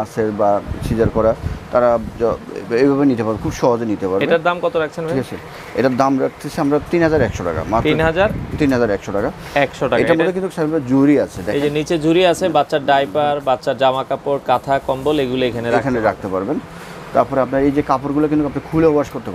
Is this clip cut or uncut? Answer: uncut